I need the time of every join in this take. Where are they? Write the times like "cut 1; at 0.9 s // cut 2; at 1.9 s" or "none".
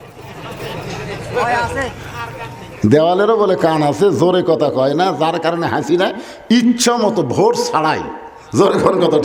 none